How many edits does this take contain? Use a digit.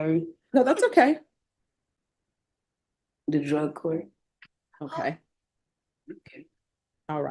0